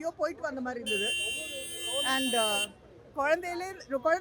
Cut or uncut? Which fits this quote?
uncut